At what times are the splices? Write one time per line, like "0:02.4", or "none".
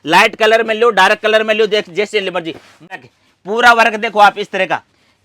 0:02.9